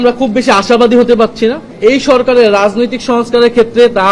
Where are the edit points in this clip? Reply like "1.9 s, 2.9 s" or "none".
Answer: 1.7 s